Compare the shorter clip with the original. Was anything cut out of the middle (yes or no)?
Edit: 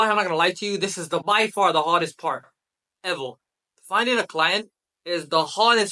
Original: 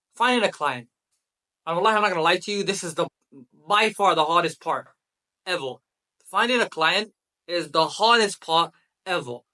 yes